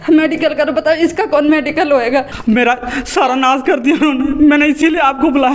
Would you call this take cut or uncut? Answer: cut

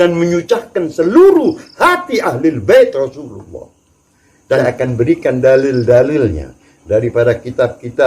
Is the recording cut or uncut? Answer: cut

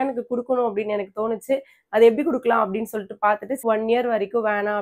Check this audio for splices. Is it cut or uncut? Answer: cut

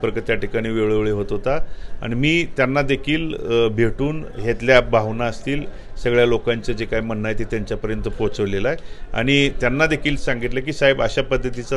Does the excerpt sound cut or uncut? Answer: uncut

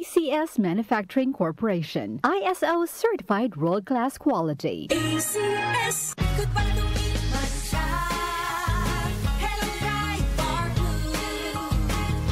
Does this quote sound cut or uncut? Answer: cut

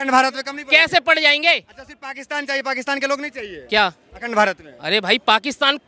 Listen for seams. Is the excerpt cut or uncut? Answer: uncut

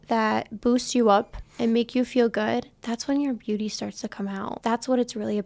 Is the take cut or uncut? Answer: cut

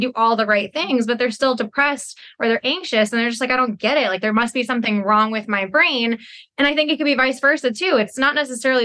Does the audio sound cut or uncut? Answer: uncut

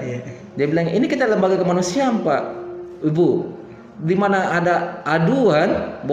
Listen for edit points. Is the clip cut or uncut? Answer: uncut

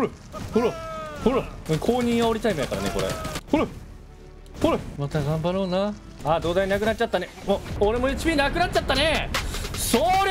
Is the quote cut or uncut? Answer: cut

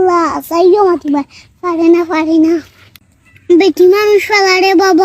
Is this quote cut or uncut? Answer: cut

